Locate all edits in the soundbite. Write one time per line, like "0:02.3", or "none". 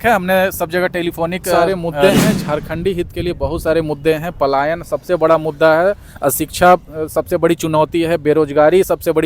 0:01.6